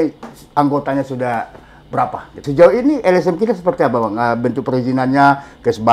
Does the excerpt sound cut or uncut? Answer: cut